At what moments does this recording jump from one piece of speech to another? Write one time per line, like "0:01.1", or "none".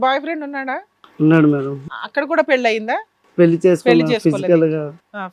0:02.0